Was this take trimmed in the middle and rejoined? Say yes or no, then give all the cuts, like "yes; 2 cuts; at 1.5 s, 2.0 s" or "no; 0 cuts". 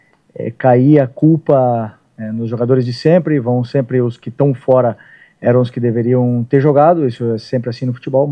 no; 0 cuts